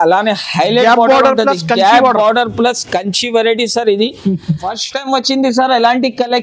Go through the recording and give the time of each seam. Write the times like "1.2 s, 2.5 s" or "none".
4.6 s